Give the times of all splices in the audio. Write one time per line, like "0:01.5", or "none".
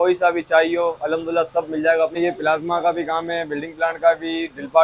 0:02.1